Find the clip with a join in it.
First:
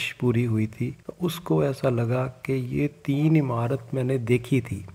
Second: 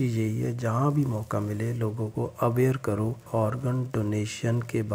second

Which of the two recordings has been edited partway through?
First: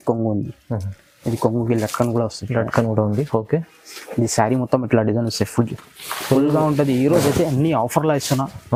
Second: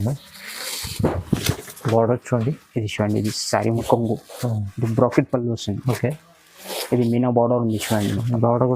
second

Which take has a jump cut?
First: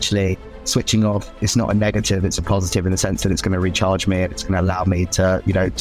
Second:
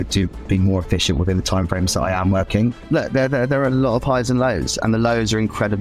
second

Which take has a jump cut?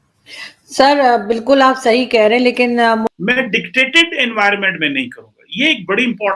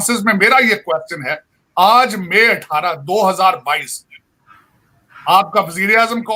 first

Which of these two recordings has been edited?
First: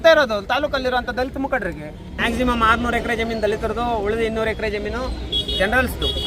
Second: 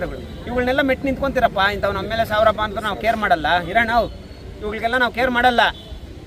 first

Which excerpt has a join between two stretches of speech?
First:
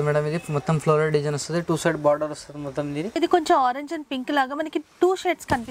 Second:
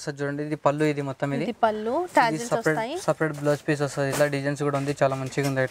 first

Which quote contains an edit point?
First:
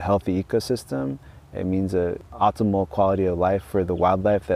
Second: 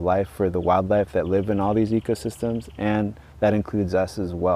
first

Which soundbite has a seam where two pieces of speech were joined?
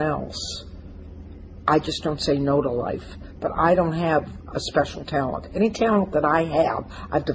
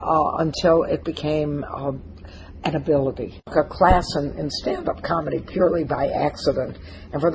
second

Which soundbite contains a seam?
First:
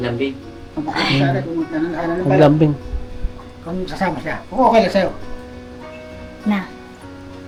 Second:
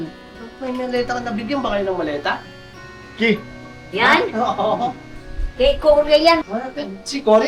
second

